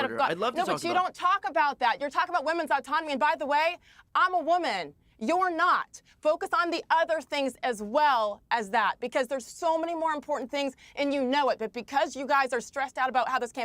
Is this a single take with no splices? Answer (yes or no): no